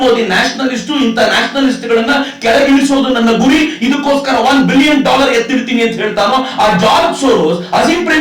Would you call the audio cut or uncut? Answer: uncut